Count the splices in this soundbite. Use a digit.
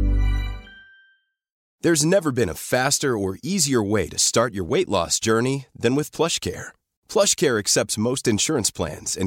1